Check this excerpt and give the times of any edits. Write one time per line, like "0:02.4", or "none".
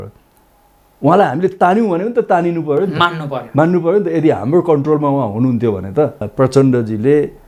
0:06.2